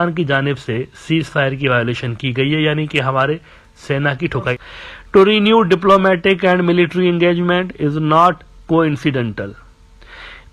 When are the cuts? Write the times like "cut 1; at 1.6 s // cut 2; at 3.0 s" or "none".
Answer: cut 1; at 4.6 s